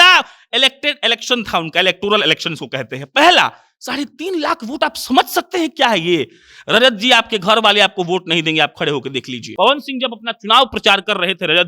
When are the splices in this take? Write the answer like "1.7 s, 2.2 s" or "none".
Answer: 9.4 s

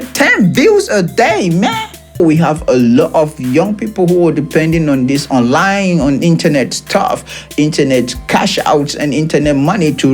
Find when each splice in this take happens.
2.2 s

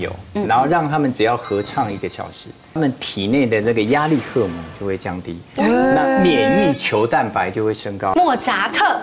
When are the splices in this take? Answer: 2.8 s, 8.1 s

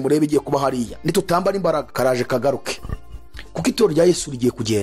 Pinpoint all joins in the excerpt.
1.9 s

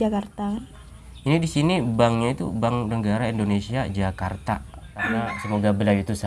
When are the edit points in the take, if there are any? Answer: 5.2 s

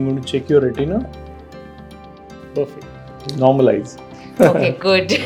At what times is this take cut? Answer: none

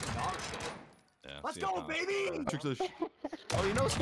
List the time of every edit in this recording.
2.5 s

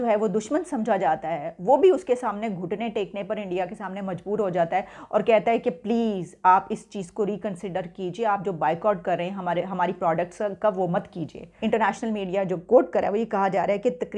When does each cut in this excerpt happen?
11.4 s

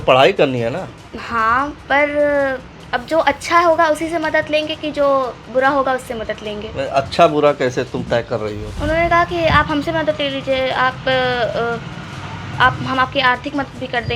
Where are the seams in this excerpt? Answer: 8.7 s

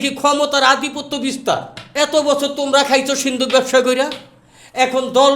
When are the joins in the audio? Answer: 1.8 s

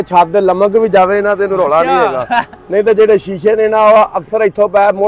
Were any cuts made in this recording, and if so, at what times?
none

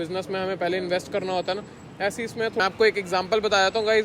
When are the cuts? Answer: 2.5 s

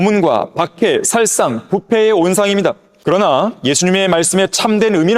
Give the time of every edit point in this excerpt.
2.9 s

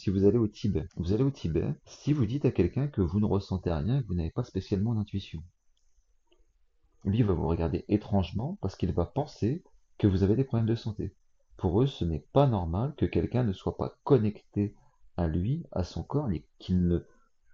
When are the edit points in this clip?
0.9 s, 1.9 s

